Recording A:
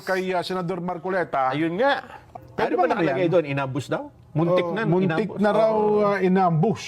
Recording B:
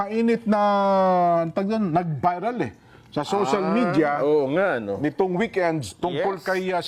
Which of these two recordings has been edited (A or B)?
A